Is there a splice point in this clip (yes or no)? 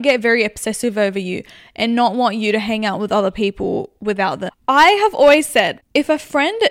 yes